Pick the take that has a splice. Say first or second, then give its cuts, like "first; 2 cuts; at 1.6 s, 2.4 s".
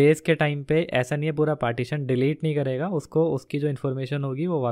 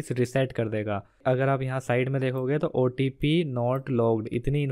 second; 1 cut; at 1.2 s